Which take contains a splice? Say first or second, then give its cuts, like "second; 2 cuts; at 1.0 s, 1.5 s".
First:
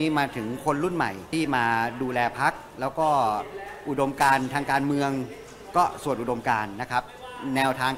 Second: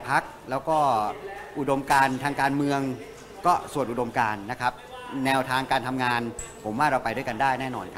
first; 1 cut; at 1.3 s